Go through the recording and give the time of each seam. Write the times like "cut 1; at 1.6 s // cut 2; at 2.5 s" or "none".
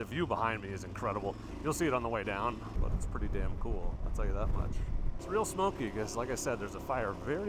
cut 1; at 2.7 s // cut 2; at 5.1 s